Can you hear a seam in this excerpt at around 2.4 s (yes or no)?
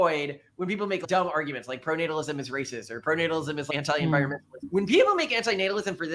no